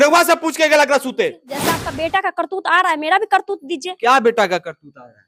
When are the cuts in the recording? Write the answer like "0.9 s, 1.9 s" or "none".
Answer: 1.8 s

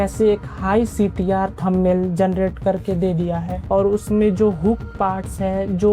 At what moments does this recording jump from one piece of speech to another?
3.5 s

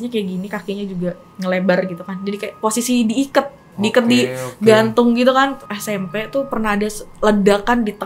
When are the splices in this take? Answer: 5.6 s

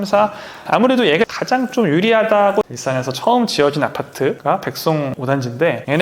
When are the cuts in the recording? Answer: 2.7 s

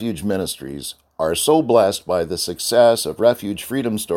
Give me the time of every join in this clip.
none

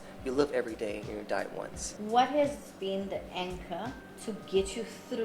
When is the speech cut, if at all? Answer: 1.8 s

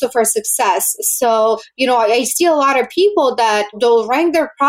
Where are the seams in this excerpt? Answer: 3.8 s

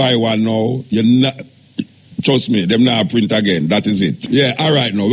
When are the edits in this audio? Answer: 4.2 s

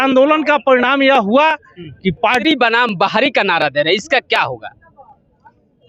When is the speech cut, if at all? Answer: 2.4 s

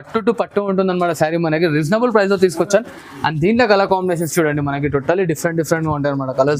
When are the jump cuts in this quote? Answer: none

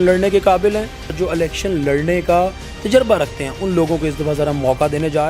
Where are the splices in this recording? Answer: 1.1 s

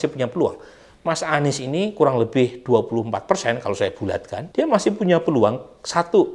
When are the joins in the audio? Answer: 4.4 s

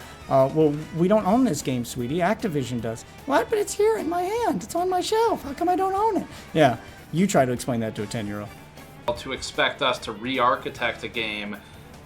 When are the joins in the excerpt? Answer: 9.1 s

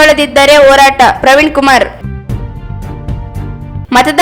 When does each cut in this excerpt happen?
2.0 s, 3.5 s

